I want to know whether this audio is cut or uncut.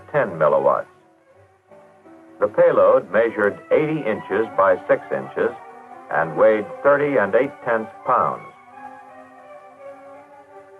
uncut